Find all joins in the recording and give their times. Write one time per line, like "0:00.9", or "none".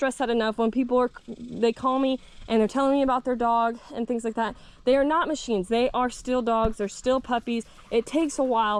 none